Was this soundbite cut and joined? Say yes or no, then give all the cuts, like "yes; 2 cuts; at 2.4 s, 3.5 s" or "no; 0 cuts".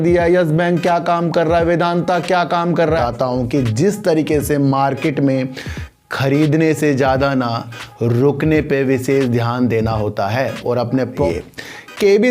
yes; 2 cuts; at 3.0 s, 11.2 s